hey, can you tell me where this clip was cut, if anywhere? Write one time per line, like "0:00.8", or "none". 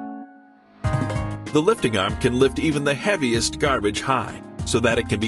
0:01.4

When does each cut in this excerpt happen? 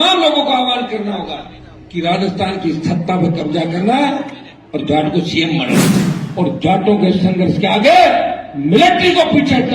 0:06.0

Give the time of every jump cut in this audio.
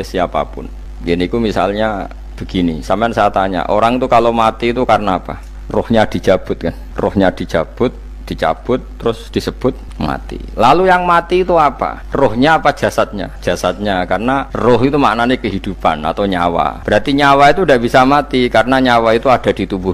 0:12.0
0:13.3
0:14.5
0:16.8

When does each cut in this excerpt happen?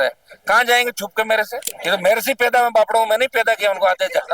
0:01.7

